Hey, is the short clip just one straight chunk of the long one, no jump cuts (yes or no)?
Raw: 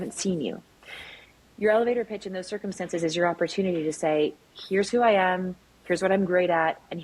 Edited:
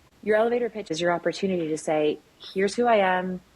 no